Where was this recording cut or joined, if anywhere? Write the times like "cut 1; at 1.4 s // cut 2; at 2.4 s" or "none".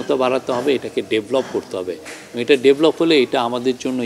none